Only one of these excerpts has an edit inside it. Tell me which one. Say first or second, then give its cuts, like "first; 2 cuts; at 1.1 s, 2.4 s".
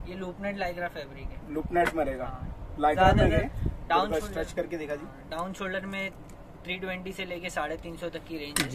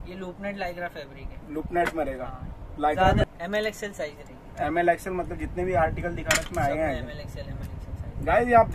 second; 1 cut; at 3.2 s